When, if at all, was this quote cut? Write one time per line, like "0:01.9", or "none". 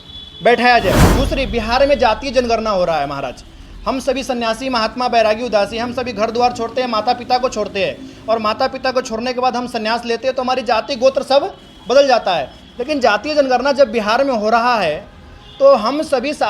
0:01.1